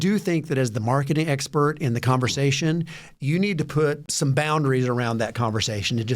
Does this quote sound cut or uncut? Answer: cut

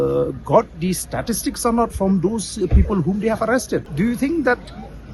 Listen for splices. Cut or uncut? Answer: cut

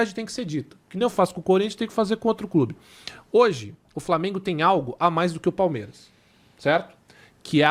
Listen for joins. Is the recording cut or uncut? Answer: uncut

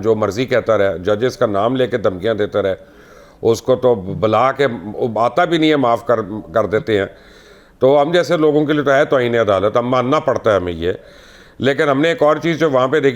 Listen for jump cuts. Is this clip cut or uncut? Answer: uncut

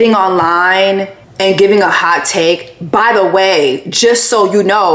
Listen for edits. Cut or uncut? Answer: cut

